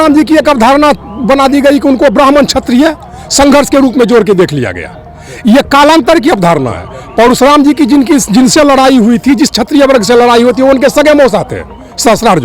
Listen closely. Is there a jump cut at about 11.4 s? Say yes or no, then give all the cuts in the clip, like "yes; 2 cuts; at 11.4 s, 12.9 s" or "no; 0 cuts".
no; 0 cuts